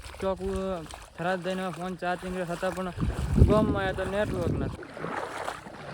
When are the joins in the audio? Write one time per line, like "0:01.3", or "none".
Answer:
0:04.8